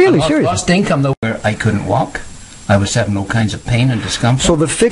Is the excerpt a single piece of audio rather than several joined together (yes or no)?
no